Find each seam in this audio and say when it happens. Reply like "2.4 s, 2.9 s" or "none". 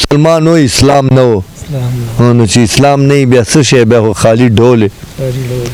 none